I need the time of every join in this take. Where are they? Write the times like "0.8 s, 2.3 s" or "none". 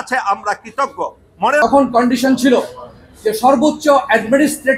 1.4 s